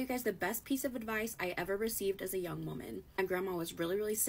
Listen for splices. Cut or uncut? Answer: cut